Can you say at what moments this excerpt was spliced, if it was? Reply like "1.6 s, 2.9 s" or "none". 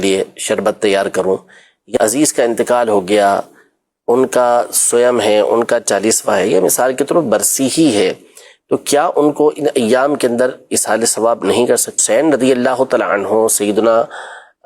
1.9 s, 12.0 s

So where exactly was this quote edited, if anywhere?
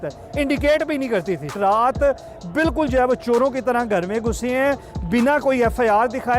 1.6 s

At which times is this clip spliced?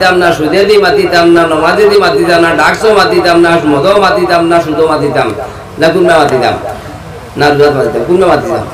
none

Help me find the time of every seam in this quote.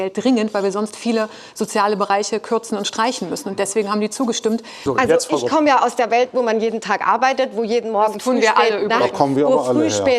4.8 s

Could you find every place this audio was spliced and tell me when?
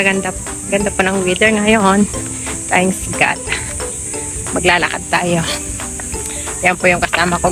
none

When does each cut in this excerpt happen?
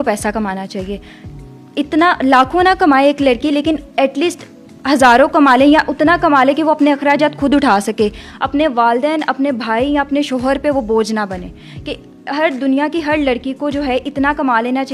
none

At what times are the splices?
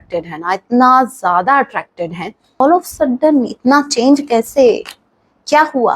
2.6 s

